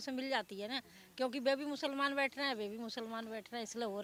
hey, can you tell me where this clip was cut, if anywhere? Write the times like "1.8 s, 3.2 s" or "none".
none

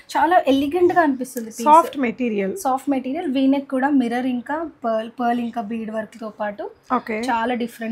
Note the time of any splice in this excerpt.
none

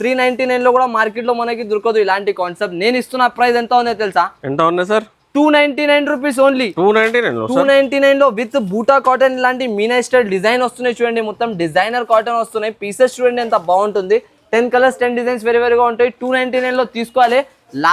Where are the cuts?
none

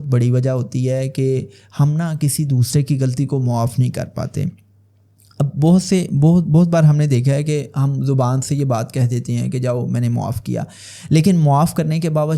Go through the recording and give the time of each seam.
none

